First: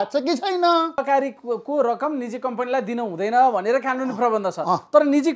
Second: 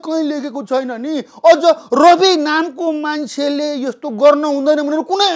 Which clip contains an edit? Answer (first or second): first